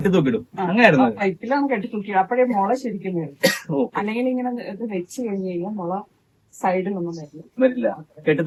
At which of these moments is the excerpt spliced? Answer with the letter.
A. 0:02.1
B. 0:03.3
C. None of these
C